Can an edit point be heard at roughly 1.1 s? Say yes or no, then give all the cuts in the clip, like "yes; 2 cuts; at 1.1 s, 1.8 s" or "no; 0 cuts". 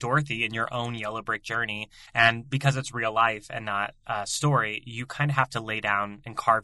no; 0 cuts